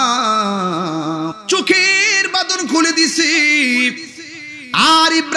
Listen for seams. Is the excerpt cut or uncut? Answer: cut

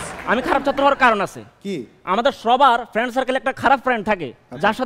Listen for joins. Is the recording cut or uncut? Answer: uncut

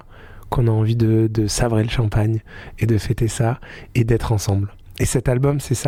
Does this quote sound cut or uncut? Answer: uncut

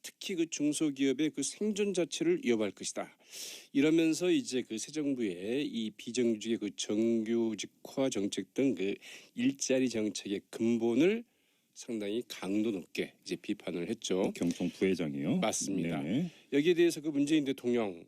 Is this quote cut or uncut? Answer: cut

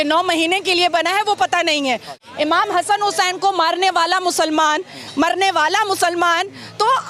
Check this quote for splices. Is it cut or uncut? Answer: cut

